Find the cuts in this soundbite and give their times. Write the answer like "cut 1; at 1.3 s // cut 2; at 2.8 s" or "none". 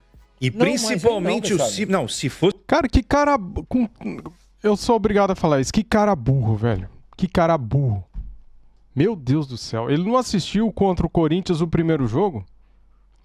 none